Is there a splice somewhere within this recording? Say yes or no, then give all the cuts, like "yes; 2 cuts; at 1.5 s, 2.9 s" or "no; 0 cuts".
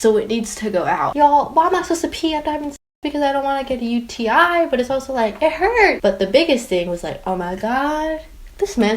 yes; 2 cuts; at 1.1 s, 6.0 s